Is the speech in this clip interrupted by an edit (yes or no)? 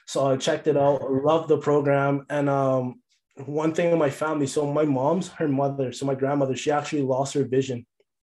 no